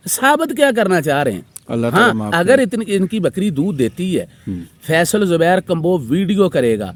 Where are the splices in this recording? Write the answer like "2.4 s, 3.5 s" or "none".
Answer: none